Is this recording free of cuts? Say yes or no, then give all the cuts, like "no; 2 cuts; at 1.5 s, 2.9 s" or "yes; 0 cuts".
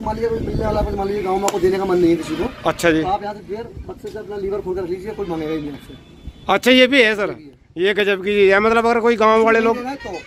yes; 0 cuts